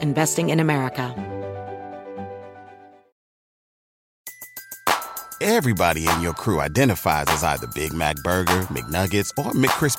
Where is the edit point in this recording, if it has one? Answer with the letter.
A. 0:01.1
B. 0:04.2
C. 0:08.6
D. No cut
A